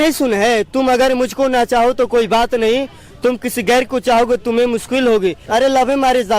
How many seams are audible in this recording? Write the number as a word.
one